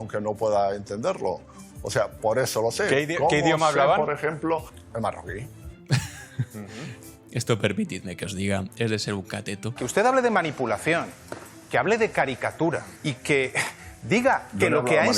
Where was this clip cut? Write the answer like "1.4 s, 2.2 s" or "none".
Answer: 4.8 s, 9.8 s, 12.9 s